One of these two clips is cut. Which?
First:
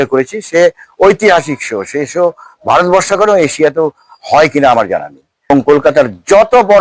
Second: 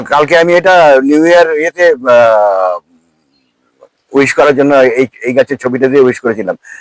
first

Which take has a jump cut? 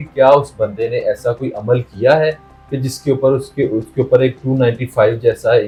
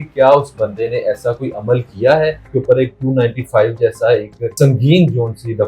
second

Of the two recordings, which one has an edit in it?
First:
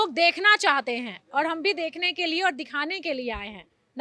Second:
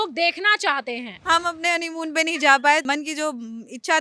second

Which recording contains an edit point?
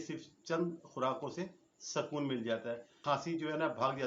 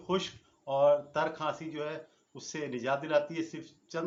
first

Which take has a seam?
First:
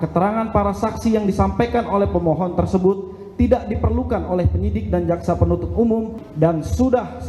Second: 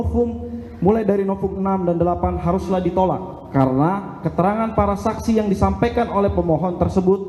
first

